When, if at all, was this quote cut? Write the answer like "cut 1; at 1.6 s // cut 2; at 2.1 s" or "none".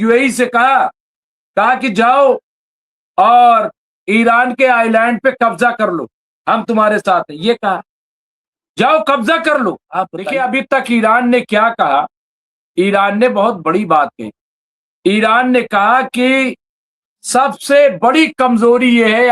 cut 1; at 10.3 s

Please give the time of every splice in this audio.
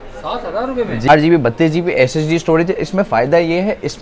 cut 1; at 1.1 s

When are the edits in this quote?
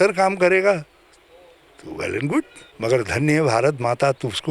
cut 1; at 2.6 s

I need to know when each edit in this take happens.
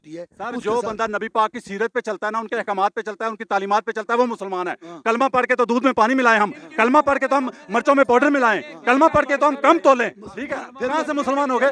none

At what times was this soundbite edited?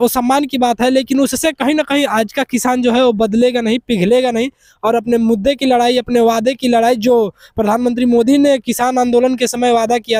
none

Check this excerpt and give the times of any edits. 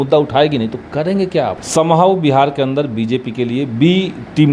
cut 1; at 1.6 s

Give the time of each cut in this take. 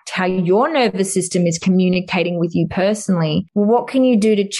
cut 1; at 3.5 s

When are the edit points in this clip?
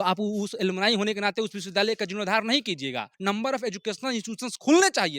cut 1; at 3.1 s

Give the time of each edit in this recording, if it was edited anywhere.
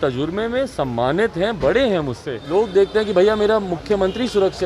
cut 1; at 2.3 s

